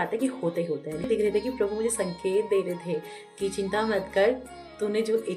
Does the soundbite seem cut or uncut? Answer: cut